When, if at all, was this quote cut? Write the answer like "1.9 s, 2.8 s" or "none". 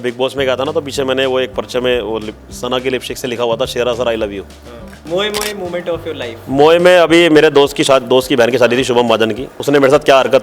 4.9 s, 9.5 s